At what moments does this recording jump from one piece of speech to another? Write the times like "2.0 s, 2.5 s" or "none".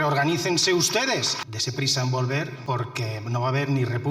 1.4 s, 2.6 s